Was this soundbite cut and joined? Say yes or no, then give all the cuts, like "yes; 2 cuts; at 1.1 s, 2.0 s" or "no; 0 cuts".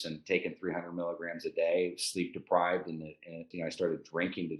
yes; 1 cut; at 3.5 s